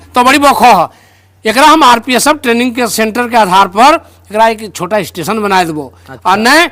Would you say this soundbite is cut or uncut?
uncut